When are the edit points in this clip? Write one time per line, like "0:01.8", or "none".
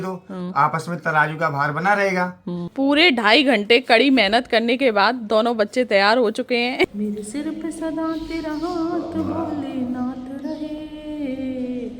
0:02.7
0:06.8